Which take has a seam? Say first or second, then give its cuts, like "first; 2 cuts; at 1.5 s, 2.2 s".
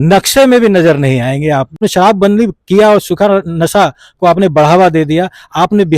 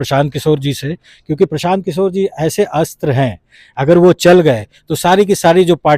first; 1 cut; at 1.8 s